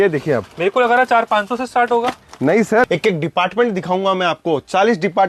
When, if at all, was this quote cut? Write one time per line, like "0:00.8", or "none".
0:02.9